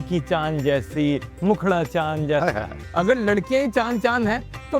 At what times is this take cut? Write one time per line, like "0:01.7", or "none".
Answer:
0:02.8